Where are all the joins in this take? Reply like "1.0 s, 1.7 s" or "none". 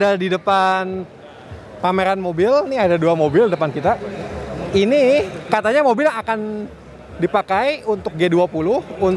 none

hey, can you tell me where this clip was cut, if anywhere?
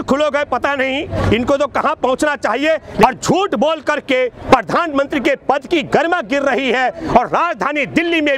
3.0 s

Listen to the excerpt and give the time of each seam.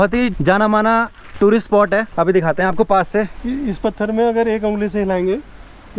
none

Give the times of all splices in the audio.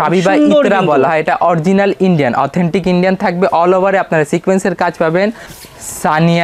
5.4 s

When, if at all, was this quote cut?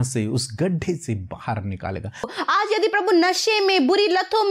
2.3 s

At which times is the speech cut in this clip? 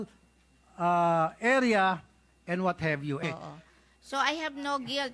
3.2 s

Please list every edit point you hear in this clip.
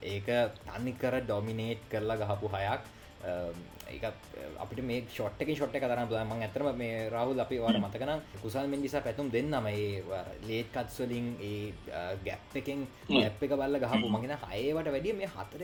none

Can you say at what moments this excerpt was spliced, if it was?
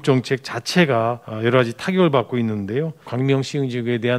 1.3 s, 3.1 s

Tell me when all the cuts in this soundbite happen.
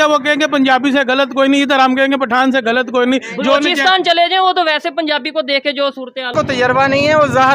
6.3 s

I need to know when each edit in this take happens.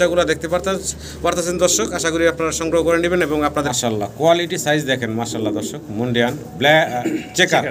3.7 s

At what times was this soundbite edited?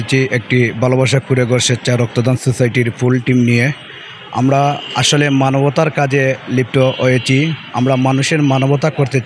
none

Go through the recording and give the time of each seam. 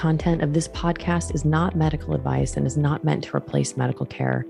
none

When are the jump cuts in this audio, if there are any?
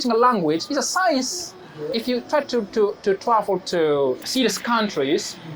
1.9 s, 4.2 s

